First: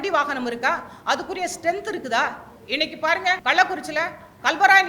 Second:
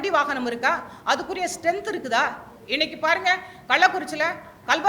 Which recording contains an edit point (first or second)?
first